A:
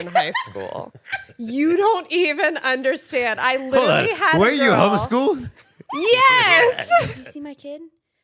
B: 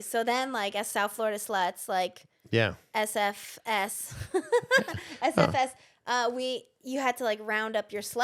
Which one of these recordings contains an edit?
A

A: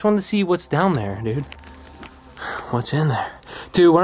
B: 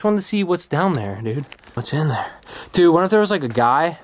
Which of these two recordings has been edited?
B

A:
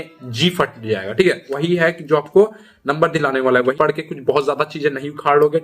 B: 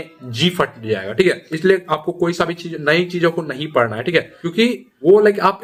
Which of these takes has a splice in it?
A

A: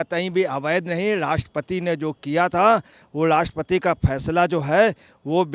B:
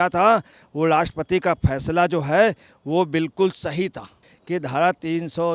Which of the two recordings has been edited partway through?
B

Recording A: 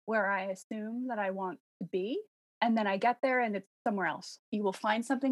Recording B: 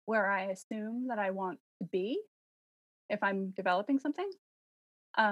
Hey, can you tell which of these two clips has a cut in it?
A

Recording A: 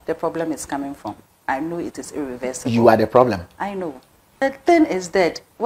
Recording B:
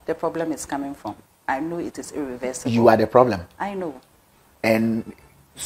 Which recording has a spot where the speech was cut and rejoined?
A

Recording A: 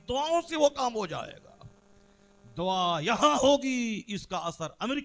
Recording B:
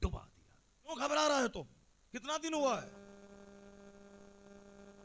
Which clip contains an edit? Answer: B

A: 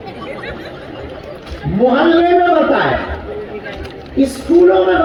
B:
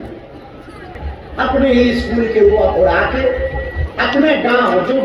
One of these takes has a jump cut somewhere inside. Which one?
B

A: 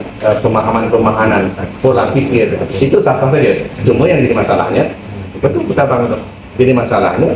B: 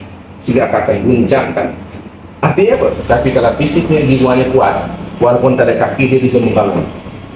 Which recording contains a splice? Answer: B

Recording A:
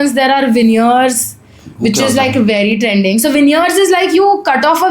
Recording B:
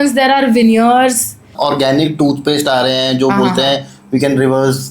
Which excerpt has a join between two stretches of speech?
B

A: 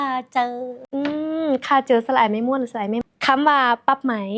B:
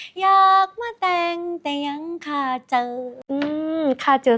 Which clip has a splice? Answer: A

